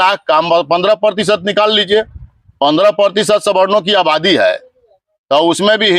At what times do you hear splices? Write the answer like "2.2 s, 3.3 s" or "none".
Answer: none